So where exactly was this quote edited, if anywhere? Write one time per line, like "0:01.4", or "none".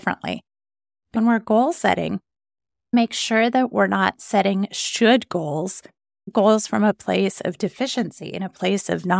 0:01.1
0:02.9